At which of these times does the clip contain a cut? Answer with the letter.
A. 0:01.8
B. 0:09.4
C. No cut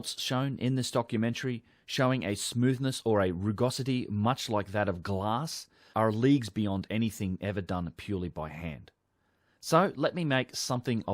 B